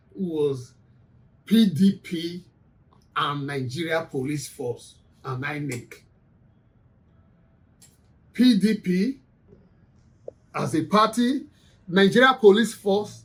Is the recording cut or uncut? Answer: uncut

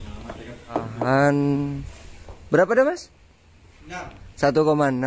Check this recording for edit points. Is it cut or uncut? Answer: cut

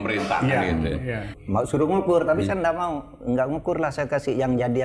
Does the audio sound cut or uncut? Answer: cut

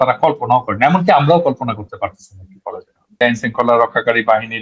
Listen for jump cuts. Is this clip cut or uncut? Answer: cut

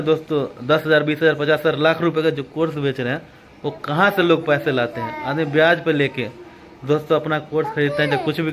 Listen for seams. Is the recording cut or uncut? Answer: uncut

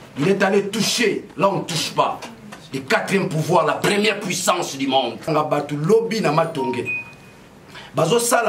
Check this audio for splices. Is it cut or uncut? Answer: cut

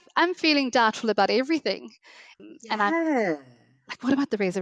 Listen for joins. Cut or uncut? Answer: uncut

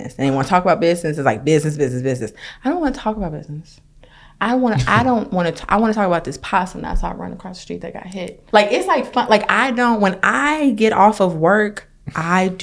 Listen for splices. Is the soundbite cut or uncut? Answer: cut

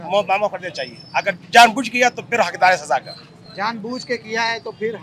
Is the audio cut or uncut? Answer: uncut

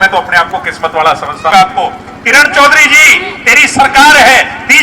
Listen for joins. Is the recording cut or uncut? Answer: cut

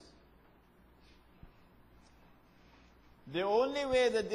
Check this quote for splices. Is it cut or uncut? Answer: cut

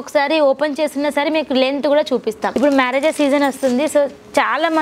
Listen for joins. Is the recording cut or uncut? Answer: cut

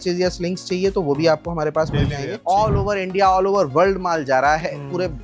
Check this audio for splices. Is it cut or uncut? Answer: cut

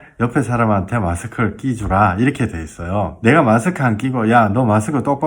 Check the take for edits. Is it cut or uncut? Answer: cut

